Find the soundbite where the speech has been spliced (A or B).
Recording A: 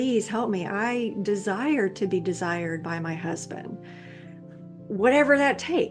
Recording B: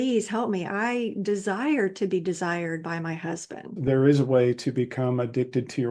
B